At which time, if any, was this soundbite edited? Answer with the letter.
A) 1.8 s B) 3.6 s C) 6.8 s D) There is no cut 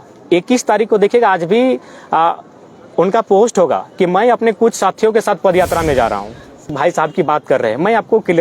C